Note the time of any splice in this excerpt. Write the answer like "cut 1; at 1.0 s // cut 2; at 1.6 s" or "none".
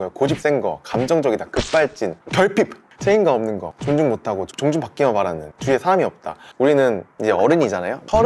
cut 1; at 2.8 s // cut 2; at 3.7 s // cut 3; at 5.5 s // cut 4; at 6.4 s // cut 5; at 7.1 s